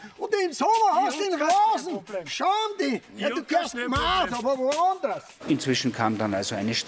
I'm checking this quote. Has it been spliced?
yes; 1 cut; at 5.3 s

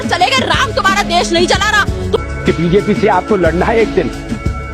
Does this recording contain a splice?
no; 0 cuts

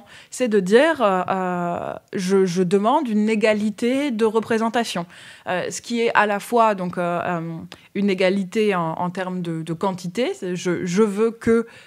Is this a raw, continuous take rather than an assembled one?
yes; 0 cuts

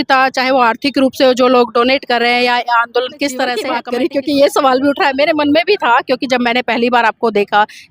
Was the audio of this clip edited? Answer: yes; 1 cut; at 3.8 s

